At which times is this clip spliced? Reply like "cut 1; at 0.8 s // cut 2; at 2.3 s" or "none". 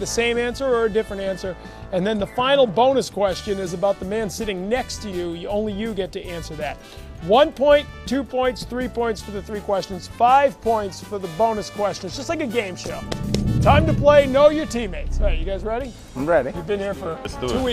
none